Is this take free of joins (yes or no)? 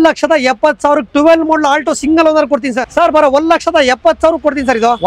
no